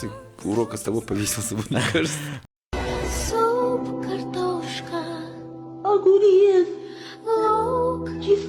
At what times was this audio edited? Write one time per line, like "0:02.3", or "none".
0:02.4

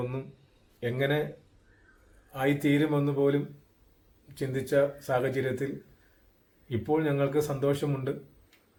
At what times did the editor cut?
none

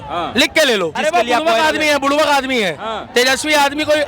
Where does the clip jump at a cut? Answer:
0:01.0

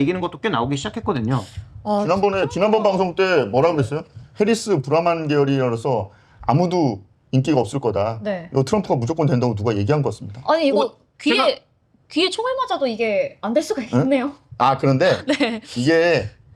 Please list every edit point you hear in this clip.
none

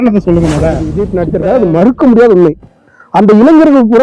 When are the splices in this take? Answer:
0:00.9

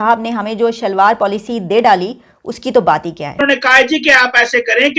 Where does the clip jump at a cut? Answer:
0:03.4

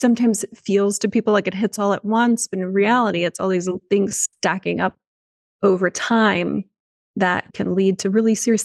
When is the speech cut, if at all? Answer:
0:07.5

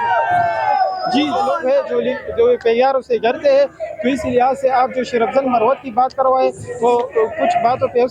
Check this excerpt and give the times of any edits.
0:01.5

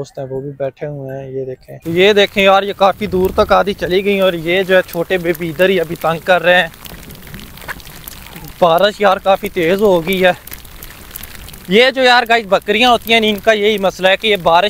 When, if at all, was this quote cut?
0:01.7

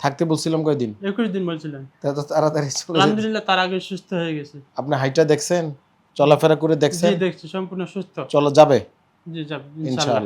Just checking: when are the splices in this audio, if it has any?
none

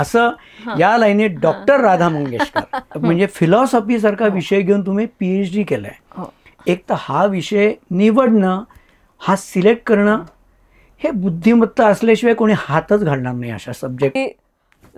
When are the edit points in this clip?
0:02.8
0:14.2

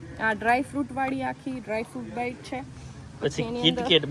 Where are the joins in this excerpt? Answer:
none

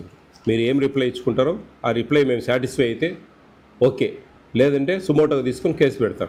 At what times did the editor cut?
none

